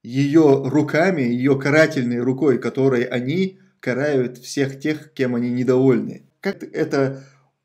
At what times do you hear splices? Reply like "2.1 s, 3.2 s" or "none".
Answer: 6.6 s